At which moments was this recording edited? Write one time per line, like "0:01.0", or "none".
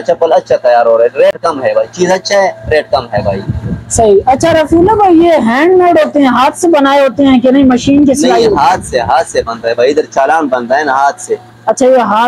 none